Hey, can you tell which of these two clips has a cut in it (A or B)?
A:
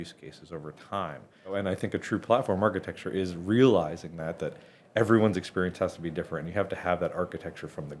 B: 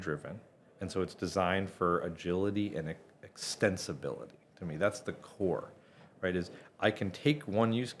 A